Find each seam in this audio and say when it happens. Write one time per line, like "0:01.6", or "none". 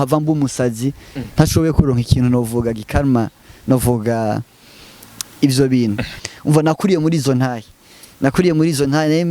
0:06.2